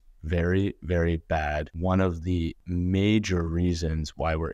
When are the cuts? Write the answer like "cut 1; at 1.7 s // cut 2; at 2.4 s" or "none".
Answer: cut 1; at 1.7 s // cut 2; at 2.6 s